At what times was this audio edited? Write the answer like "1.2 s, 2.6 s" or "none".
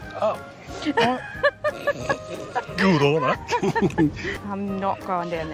4.3 s